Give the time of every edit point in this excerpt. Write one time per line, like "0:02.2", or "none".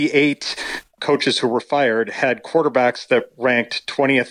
0:00.9